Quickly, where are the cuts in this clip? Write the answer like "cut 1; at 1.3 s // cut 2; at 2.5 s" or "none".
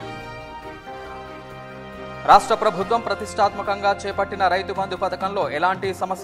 cut 1; at 2.1 s